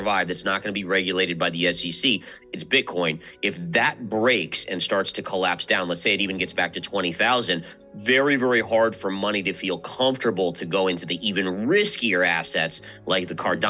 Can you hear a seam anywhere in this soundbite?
no; 0 cuts

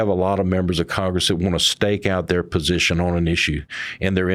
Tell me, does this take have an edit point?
no; 0 cuts

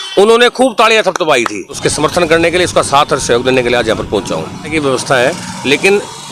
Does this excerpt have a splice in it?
yes; 2 cuts; at 1.8 s, 4.7 s

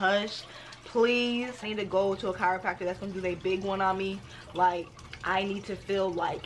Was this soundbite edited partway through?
yes; 1 cut; at 1.6 s

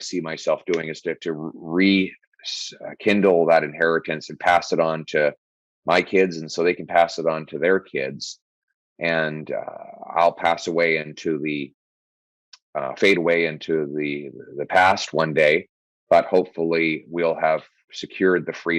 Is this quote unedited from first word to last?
yes; 0 cuts

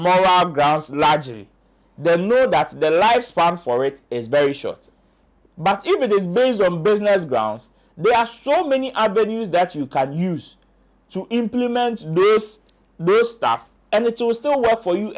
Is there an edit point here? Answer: no; 0 cuts

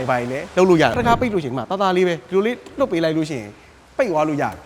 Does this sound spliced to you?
yes; 1 cut; at 1.0 s

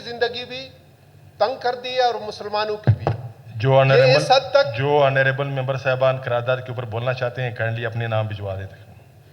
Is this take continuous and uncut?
yes; 0 cuts

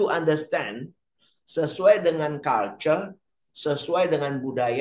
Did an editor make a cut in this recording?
no; 0 cuts

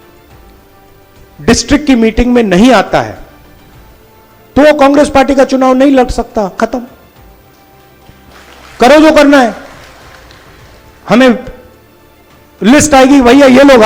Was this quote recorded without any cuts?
yes; 0 cuts

